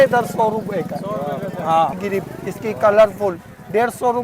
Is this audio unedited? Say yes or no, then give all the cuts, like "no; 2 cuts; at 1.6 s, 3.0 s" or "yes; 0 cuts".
no; 1 cut; at 2.0 s